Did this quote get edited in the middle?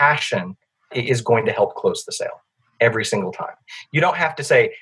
yes; 1 cut; at 0.9 s

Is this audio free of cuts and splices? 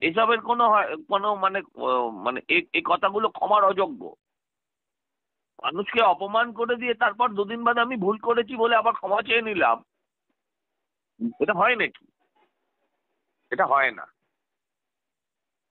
yes; 0 cuts

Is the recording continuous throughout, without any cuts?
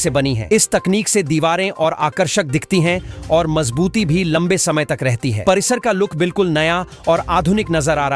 yes; 0 cuts

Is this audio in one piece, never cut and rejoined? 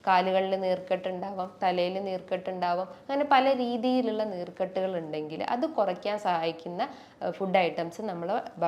yes; 0 cuts

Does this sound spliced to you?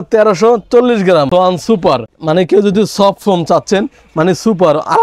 yes; 1 cut; at 1.3 s

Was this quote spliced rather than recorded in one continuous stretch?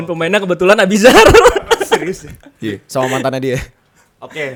no; 0 cuts

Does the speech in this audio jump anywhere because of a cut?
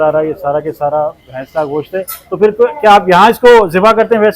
no; 0 cuts

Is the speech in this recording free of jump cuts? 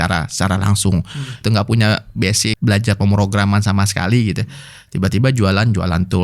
no; 2 cuts; at 1.4 s, 2.6 s

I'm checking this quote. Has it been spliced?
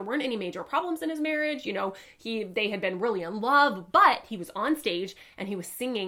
no; 0 cuts

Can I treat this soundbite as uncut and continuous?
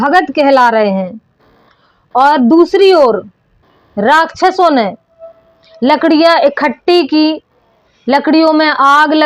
yes; 0 cuts

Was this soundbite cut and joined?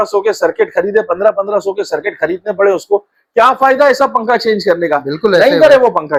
no; 0 cuts

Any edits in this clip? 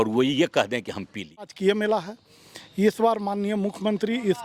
yes; 1 cut; at 1.5 s

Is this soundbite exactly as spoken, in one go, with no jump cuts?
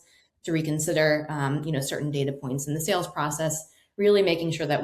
yes; 0 cuts

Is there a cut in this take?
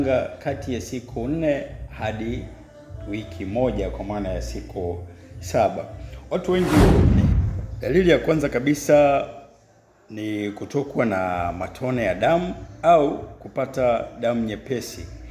yes; 1 cut; at 7.1 s

